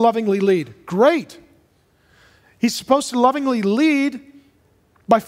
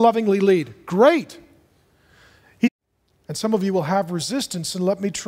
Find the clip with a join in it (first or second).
first